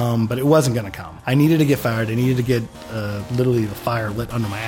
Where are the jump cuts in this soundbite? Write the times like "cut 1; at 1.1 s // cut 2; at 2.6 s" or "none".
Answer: none